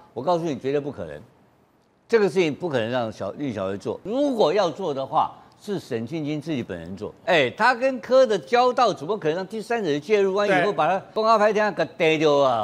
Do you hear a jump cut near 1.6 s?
no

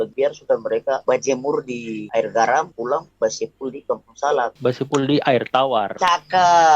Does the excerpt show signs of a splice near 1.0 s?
no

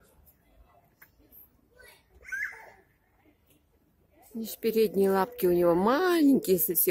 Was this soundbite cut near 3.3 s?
no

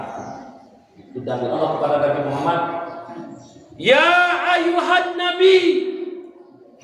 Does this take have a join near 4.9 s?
no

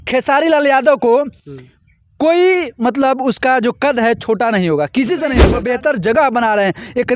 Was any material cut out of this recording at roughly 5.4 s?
yes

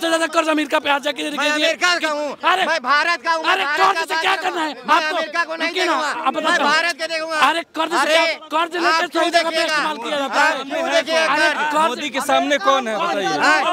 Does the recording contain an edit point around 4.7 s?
no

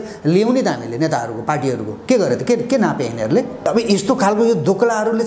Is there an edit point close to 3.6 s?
yes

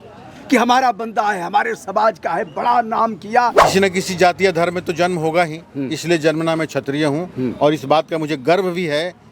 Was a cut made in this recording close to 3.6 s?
yes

